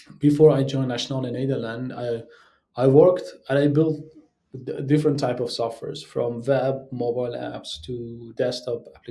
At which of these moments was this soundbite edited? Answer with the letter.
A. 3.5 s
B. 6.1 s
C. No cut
C